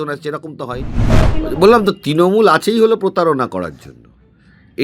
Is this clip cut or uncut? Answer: cut